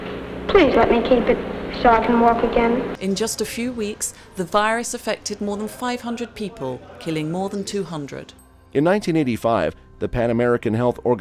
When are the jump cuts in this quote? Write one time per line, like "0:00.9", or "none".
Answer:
none

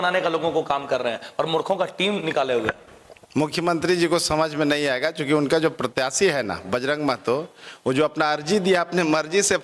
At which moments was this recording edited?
none

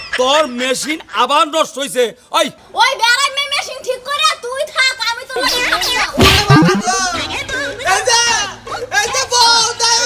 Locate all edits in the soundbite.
0:02.6

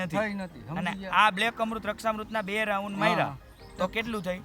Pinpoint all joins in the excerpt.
none

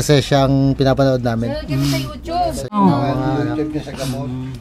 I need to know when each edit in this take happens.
0:02.8

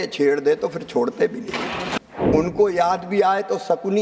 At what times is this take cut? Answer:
0:02.0

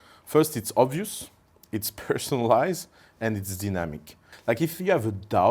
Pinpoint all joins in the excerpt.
0:04.3

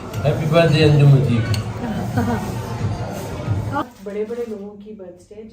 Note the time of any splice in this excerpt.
0:03.8

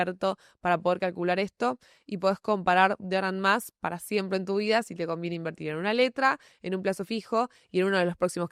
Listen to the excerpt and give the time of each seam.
none

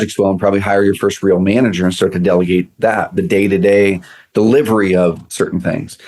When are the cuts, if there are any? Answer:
none

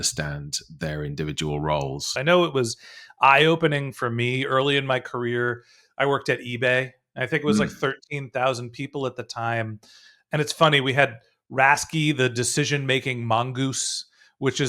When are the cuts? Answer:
0:02.1

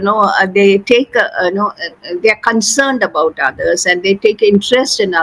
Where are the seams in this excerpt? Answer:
none

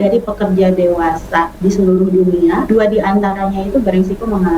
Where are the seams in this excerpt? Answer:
0:02.6

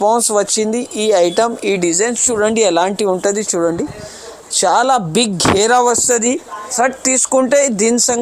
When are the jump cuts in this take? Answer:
0:06.7

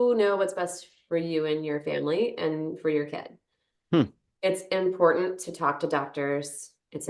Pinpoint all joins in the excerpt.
none

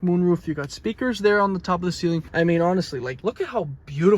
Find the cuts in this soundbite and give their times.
0:02.3
0:03.0

